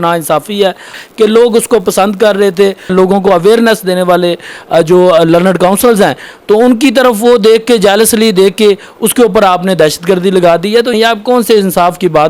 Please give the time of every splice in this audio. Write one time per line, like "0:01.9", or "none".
0:01.0
0:02.9
0:10.9